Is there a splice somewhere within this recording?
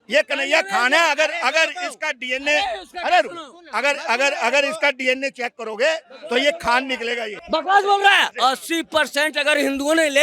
yes; 2 cuts; at 7.3 s, 8.3 s

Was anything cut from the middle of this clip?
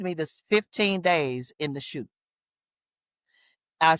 no; 0 cuts

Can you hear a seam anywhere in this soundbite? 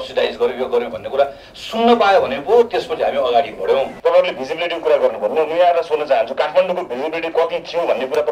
yes; 1 cut; at 3.9 s

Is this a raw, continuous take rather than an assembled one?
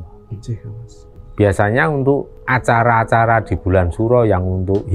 yes; 0 cuts

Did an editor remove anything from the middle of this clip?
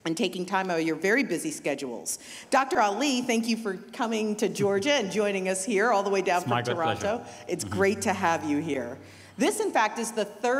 no; 0 cuts

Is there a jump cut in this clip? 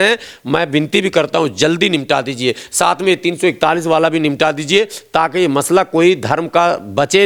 no; 0 cuts

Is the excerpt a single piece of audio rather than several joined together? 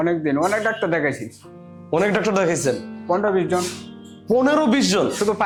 yes; 0 cuts

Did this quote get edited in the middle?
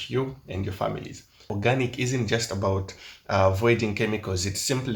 yes; 1 cut; at 1.4 s

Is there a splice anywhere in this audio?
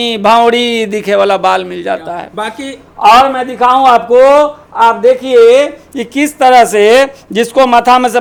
no; 0 cuts

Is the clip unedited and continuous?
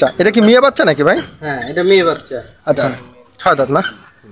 no; 1 cut; at 2.8 s

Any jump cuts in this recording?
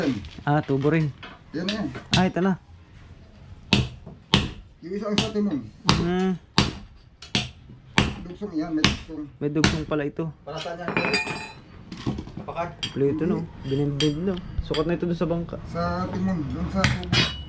no; 0 cuts

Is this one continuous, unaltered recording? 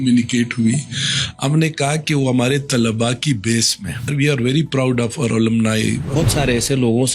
no; 2 cuts; at 4.1 s, 6.2 s

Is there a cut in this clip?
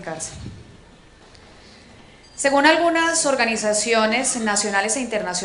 no; 0 cuts

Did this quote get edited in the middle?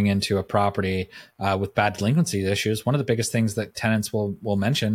no; 0 cuts

